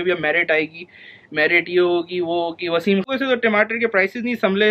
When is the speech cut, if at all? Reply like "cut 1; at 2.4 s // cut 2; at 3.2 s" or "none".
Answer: cut 1; at 3.1 s